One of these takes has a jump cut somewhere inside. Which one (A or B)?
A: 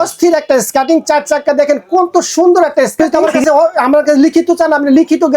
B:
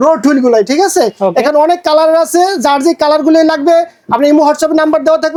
A